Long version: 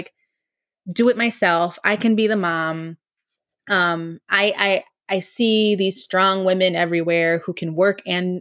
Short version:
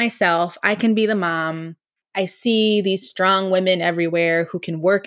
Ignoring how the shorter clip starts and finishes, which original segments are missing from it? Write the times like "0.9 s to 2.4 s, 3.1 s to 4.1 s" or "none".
3.2 s to 4.9 s